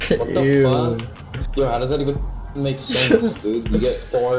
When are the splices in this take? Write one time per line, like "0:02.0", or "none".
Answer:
none